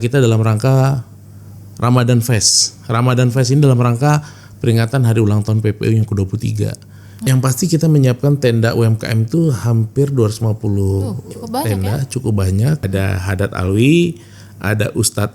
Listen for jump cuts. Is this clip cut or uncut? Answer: cut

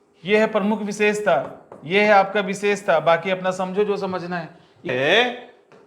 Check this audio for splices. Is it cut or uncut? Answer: cut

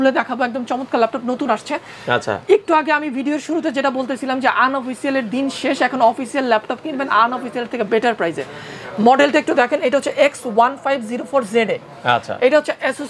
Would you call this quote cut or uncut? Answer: uncut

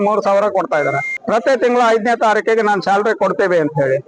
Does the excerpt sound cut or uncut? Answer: cut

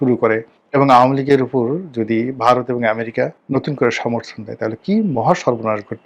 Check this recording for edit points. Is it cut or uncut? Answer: cut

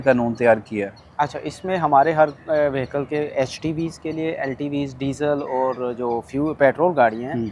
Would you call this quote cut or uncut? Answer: uncut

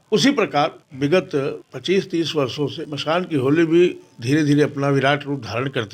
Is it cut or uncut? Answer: cut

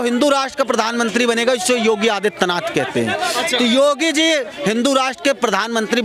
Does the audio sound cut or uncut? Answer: uncut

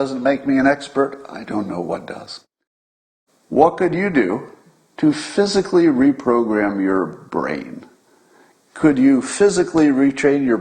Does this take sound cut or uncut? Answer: cut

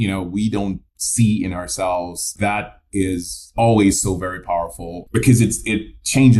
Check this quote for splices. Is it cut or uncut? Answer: cut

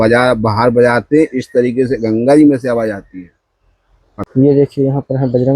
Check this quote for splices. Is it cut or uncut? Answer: cut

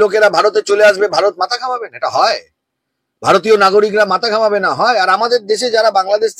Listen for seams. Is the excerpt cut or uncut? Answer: uncut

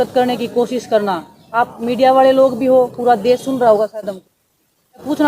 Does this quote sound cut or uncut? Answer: cut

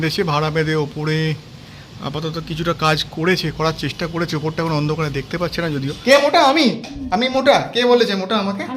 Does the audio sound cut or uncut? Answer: cut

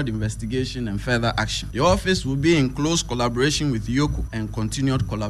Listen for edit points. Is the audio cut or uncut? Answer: cut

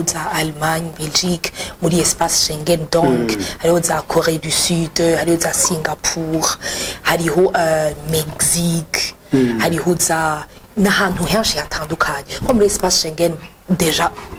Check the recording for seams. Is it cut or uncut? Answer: uncut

